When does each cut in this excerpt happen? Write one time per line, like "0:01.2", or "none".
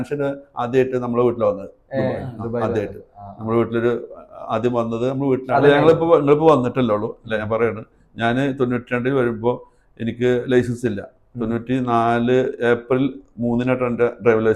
0:05.6